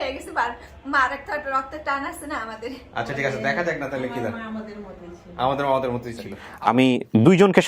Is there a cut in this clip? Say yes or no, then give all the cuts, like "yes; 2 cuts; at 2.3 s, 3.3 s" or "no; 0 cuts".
yes; 1 cut; at 6.5 s